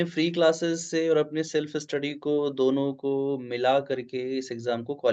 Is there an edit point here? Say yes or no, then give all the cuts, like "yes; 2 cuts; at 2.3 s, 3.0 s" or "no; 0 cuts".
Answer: no; 0 cuts